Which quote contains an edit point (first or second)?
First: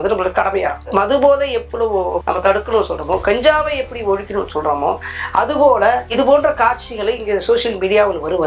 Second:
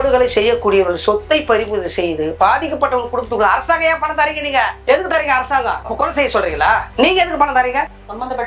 first